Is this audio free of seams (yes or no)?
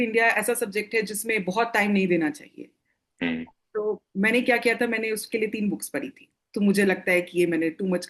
yes